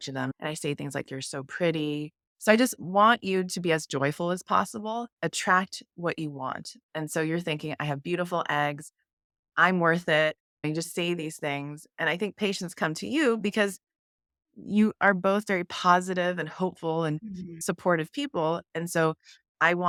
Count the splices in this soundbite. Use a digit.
0